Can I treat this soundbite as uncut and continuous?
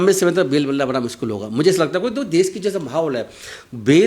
yes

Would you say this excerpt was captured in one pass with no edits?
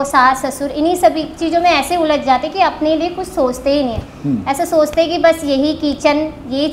yes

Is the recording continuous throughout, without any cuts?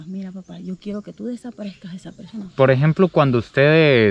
no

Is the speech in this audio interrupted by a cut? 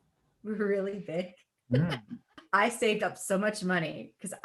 yes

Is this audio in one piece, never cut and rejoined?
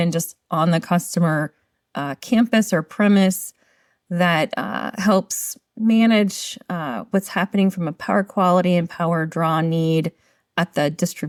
yes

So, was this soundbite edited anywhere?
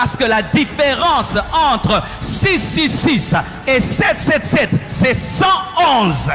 no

